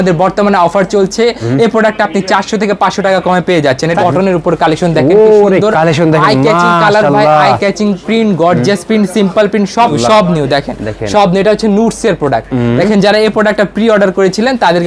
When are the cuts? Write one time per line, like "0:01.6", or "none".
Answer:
0:04.0
0:09.9